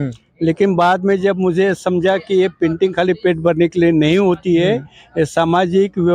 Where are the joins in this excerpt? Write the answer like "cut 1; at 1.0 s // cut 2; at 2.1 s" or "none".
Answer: none